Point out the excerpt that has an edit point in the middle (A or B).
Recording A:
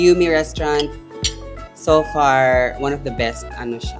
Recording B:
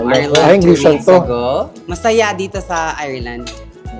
B